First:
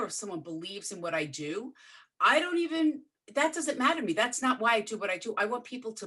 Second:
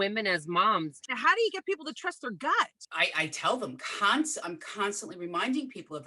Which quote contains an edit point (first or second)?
second